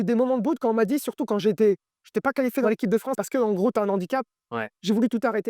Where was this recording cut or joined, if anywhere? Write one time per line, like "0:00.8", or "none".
0:02.7